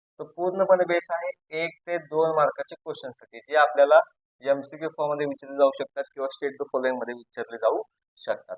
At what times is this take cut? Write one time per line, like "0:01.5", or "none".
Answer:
none